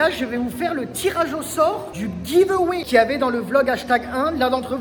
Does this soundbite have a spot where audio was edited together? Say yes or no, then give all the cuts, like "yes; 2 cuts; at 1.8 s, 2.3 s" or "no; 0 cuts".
no; 0 cuts